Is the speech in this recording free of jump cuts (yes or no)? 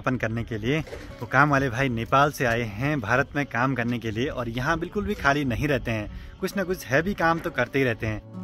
yes